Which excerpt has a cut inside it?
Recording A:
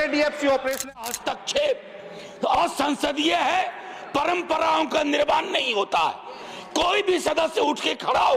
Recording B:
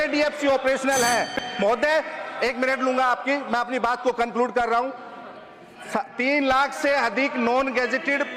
A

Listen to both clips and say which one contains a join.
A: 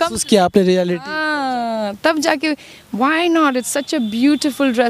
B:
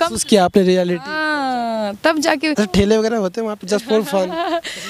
B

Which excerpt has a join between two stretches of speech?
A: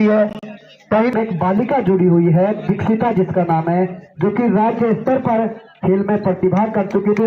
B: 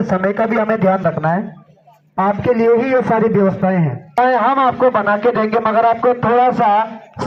A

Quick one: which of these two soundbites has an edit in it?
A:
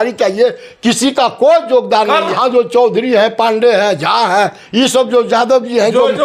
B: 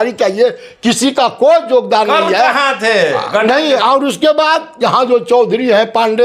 A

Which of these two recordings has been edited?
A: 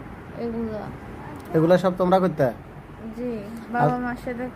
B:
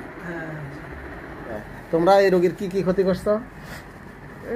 B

